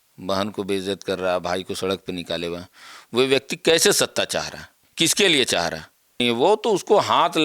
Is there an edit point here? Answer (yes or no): yes